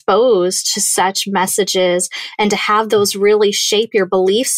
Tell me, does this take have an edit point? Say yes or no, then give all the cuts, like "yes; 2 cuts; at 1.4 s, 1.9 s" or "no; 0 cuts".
no; 0 cuts